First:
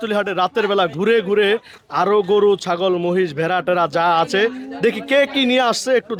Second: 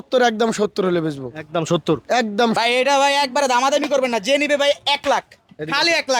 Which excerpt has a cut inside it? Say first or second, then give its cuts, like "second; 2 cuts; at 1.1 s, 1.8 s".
second; 1 cut; at 2.6 s